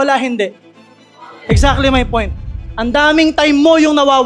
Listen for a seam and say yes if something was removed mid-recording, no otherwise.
no